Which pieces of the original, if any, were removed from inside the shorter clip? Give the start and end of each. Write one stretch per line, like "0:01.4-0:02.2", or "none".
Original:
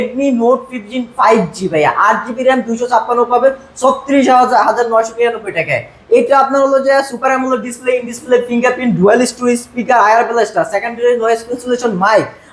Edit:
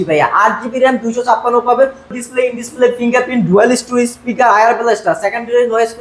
0:03.8-0:07.6